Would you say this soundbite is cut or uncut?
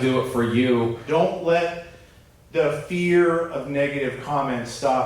cut